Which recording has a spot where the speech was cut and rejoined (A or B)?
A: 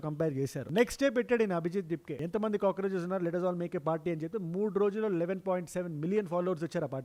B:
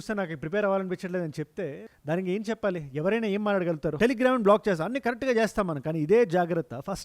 B